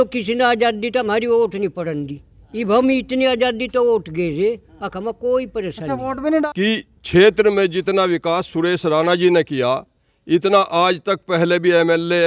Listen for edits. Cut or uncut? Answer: cut